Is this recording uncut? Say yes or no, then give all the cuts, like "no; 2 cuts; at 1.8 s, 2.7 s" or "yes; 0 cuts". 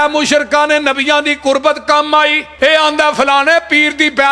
no; 1 cut; at 2.4 s